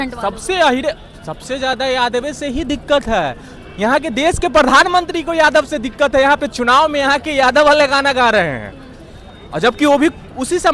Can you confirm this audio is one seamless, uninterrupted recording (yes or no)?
yes